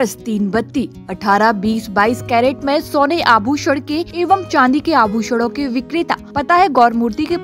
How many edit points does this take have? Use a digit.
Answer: 2